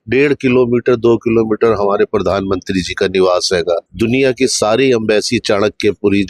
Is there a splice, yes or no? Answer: yes